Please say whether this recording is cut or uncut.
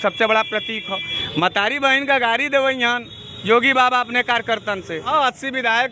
cut